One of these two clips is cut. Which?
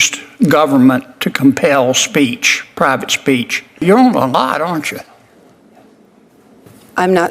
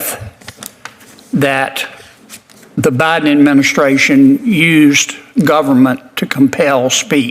first; 1 cut; at 3.8 s

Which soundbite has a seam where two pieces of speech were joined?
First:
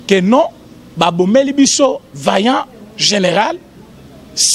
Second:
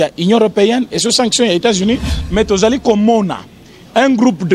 second; 1 cut; at 2.2 s

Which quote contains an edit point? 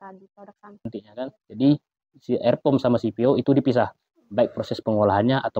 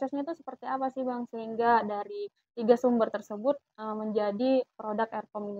first; 1 cut; at 1.0 s

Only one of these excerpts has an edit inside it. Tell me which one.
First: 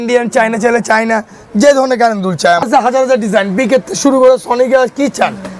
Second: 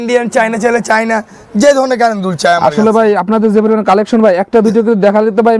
first; 1 cut; at 2.6 s

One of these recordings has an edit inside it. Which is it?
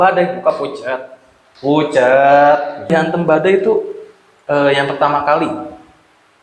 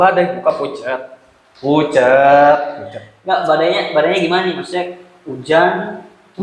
first; 1 cut; at 2.9 s

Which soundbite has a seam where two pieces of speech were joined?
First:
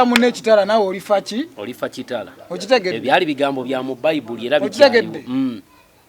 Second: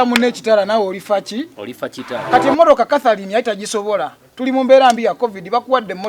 second; 1 cut; at 2.1 s

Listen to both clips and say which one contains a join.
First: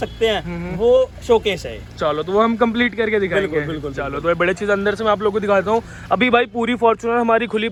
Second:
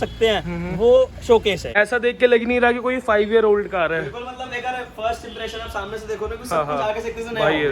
second; 1 cut; at 1.7 s

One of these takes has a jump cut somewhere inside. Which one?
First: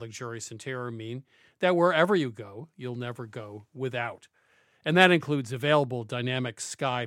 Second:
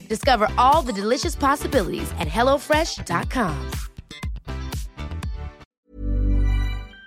second; 1 cut; at 5.6 s

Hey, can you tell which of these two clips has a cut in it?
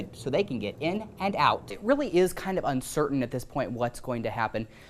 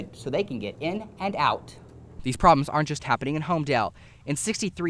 first; 1 cut; at 1.8 s

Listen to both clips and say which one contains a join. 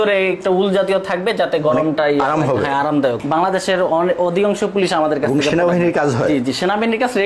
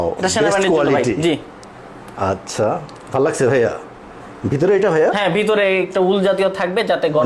first; 1 cut; at 3.2 s

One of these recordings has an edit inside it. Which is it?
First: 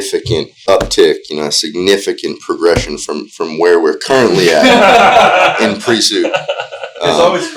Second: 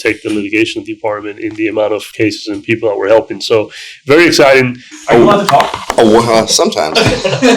second; 1 cut; at 4.8 s

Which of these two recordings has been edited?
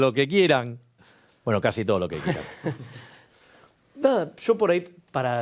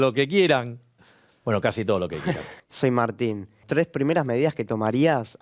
second; 2 cuts; at 2.5 s, 3.6 s

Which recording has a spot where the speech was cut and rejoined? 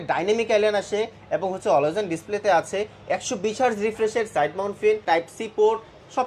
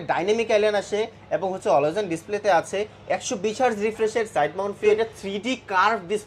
second; 1 cut; at 4.9 s

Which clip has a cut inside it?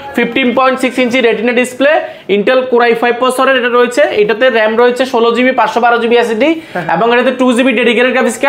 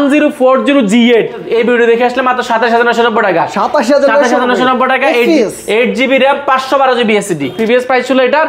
second; 2 cuts; at 1.4 s, 7.6 s

